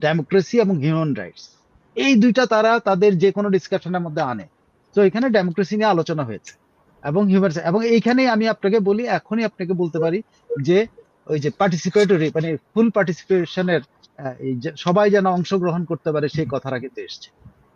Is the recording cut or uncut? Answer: uncut